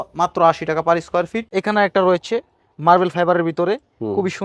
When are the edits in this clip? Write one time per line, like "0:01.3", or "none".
0:01.4